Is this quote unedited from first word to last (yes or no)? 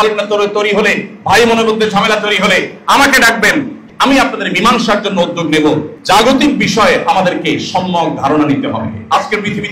no